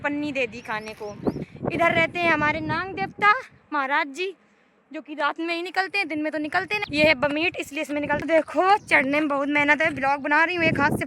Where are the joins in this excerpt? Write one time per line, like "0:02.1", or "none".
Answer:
0:01.5
0:08.2